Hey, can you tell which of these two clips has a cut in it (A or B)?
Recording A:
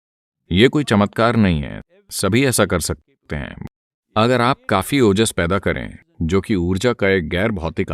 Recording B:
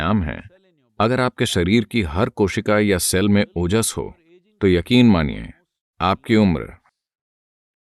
A